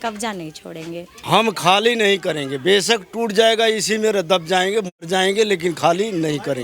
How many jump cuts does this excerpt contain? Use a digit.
1